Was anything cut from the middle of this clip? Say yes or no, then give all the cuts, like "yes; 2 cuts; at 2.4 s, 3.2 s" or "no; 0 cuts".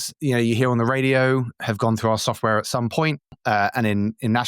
yes; 2 cuts; at 1.6 s, 3.3 s